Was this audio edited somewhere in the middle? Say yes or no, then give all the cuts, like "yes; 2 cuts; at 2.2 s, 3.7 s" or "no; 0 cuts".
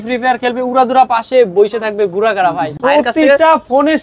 yes; 1 cut; at 2.7 s